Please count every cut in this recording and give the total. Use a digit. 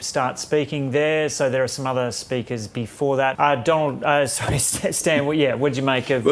1